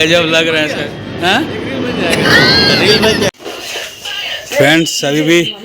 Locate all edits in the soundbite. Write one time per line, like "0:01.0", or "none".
0:03.3